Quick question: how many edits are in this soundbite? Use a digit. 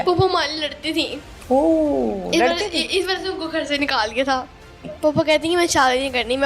1